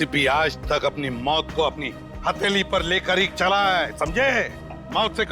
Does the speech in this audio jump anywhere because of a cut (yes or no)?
no